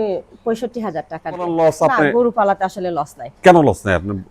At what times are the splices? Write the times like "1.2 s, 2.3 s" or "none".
1.5 s